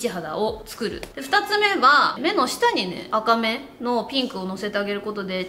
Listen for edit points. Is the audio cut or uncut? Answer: cut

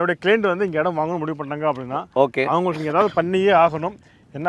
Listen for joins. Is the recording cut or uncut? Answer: uncut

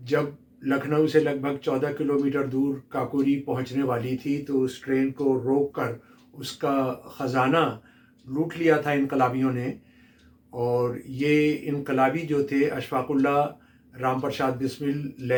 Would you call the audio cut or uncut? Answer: uncut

